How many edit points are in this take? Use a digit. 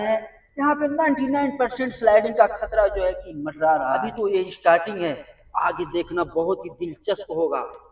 0